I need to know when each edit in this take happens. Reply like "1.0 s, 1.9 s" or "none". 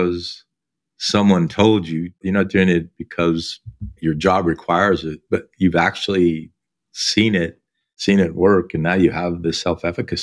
2.2 s, 3.9 s